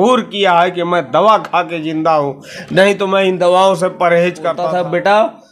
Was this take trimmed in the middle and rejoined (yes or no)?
yes